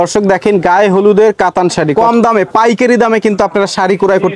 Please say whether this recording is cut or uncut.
cut